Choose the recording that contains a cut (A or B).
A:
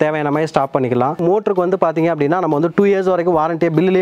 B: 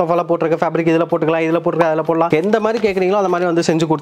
A